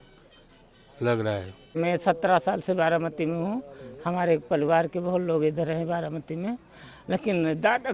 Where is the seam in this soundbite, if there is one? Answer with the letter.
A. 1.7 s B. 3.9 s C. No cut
A